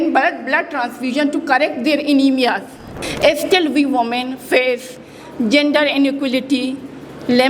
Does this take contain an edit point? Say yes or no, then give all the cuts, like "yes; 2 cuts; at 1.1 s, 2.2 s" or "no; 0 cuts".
yes; 1 cut; at 3.0 s